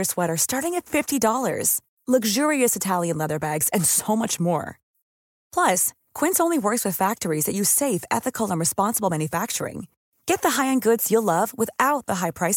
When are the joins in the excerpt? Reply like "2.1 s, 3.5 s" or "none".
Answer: none